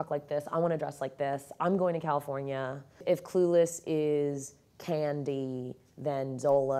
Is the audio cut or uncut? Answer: cut